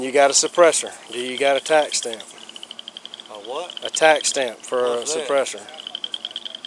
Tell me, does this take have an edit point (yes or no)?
no